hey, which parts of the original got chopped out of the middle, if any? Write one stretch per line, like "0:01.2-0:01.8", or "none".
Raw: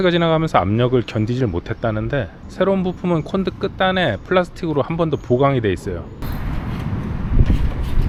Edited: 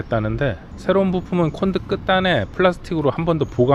none